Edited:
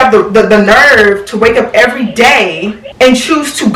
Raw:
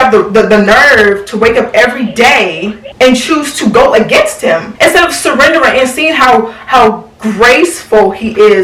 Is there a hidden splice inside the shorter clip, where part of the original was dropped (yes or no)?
no